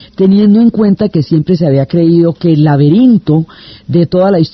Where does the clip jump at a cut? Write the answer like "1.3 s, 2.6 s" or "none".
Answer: none